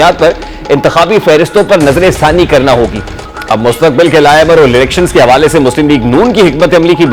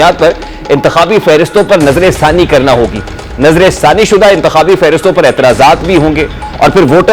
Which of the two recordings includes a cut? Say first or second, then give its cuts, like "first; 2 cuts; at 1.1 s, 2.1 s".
first; 1 cut; at 3.3 s